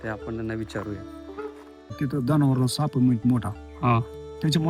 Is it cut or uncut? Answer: cut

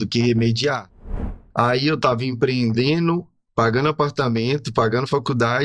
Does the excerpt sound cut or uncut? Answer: cut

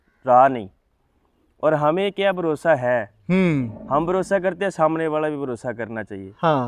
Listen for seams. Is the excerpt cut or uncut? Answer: uncut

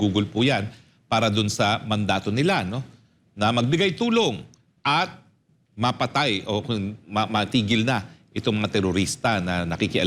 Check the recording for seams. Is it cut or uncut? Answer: uncut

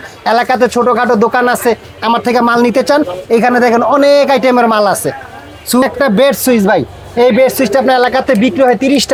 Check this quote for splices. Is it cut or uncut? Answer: uncut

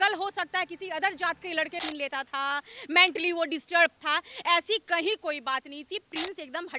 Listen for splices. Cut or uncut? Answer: cut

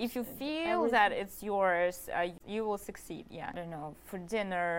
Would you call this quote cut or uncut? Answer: cut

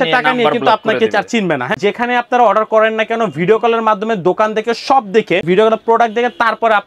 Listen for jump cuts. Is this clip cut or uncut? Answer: cut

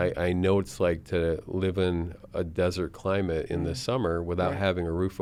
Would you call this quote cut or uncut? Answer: uncut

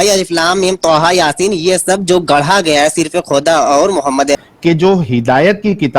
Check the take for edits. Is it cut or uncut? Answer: cut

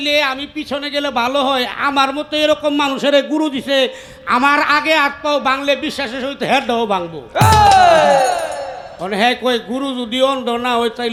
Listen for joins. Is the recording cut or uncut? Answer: uncut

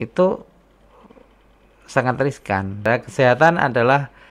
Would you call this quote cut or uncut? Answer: cut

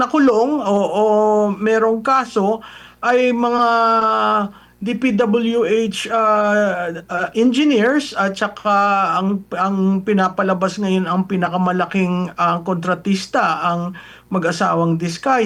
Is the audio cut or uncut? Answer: uncut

